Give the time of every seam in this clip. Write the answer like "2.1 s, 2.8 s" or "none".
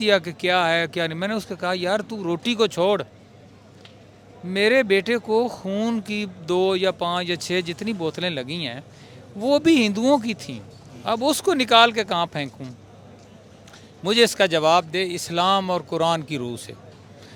none